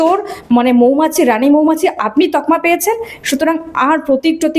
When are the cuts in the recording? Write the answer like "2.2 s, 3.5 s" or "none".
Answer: none